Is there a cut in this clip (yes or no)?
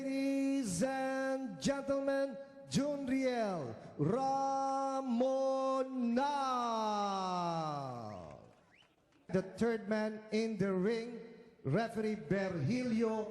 yes